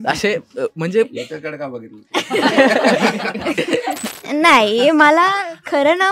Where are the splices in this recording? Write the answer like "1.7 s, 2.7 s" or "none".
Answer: 4.1 s